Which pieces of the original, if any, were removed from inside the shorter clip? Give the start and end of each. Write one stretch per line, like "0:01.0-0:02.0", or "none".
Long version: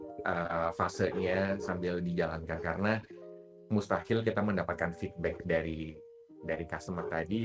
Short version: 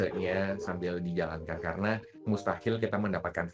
0:03.1-0:03.6